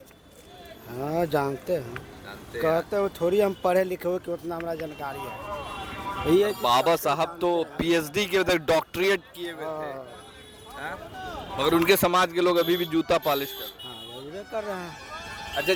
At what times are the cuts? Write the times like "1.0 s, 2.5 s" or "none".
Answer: none